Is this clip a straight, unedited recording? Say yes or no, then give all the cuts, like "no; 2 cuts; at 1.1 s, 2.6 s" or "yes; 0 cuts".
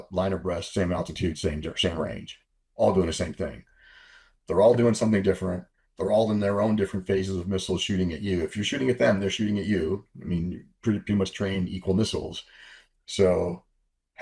yes; 0 cuts